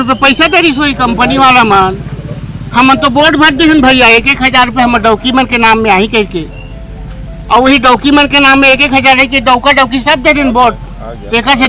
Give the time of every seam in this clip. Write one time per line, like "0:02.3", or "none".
none